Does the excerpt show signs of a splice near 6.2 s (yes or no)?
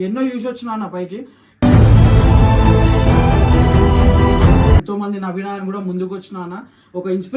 no